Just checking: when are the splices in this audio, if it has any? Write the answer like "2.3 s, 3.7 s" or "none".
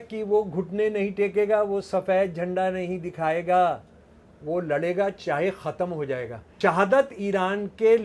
6.4 s